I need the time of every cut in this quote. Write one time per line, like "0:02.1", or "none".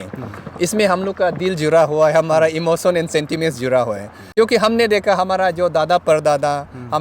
0:04.1

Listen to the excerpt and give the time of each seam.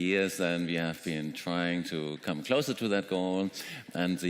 0:02.9

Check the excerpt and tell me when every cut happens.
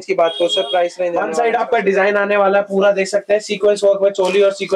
0:01.2

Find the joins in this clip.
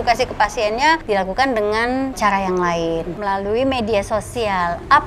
0:01.0
0:02.2
0:03.1

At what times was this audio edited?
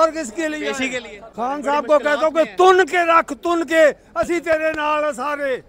0:01.2

